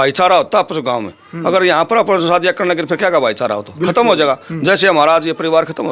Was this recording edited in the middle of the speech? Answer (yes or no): no